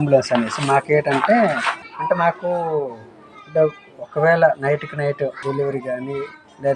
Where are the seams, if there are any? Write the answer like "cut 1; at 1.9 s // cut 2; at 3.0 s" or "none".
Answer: cut 1; at 1.7 s // cut 2; at 5.4 s